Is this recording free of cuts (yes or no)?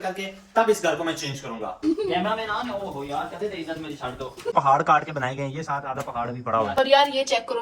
no